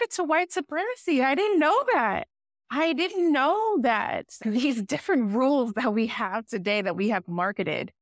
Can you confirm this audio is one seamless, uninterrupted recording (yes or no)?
yes